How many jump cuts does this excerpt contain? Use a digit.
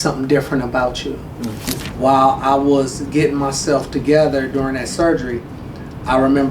1